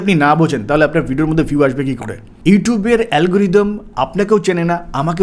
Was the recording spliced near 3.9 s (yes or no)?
no